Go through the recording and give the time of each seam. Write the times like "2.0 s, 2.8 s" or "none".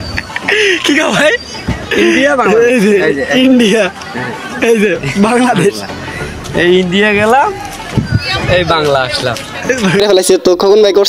10.0 s